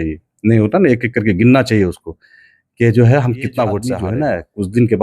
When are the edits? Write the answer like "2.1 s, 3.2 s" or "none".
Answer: 3.9 s